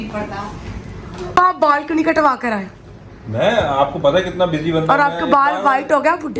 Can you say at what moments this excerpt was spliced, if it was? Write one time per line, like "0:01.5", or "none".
none

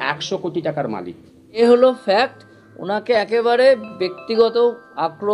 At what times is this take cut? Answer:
0:01.6

